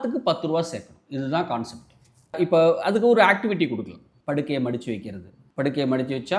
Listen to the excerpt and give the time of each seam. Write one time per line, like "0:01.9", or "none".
none